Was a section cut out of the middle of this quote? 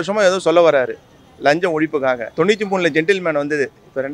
yes; 1 cut; at 2.3 s

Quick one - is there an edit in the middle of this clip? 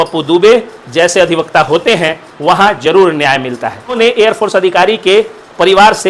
yes; 1 cut; at 4.0 s

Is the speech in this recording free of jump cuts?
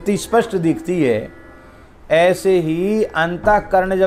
yes; 0 cuts

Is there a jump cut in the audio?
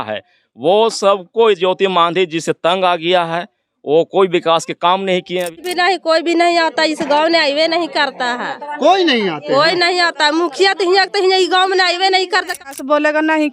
yes; 2 cuts; at 5.7 s, 12.7 s

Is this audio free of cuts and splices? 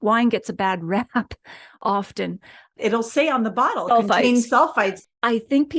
no; 2 cuts; at 2.8 s, 5.0 s

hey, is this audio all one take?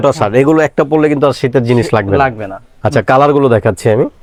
yes; 0 cuts

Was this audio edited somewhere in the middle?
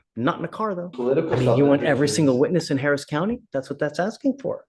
yes; 1 cut; at 0.9 s

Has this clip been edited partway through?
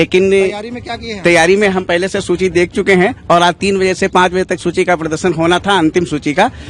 no; 0 cuts

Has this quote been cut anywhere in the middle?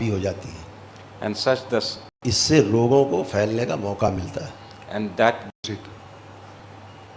no; 0 cuts

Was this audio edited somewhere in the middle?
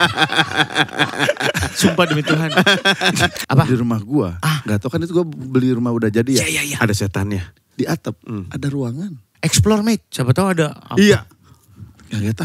yes; 2 cuts; at 3.4 s, 9.3 s

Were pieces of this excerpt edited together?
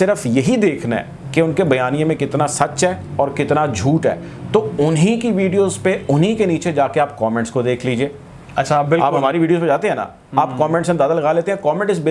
no; 0 cuts

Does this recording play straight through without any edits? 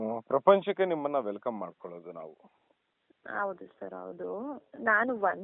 yes; 0 cuts

